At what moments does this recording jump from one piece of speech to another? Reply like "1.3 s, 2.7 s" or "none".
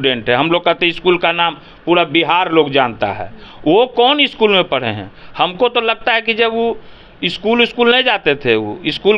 none